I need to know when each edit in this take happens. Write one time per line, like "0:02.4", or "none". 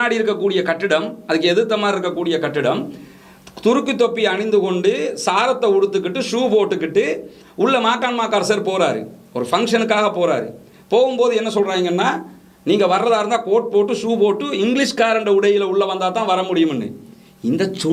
none